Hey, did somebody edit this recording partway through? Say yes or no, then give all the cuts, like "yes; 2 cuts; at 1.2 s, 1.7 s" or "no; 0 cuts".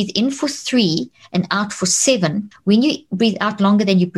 yes; 1 cut; at 2.5 s